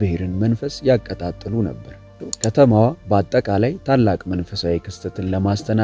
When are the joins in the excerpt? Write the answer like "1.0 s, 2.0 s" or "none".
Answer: 2.2 s